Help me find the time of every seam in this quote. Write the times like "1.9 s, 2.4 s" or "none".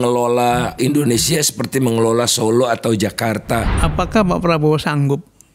0.8 s, 3.7 s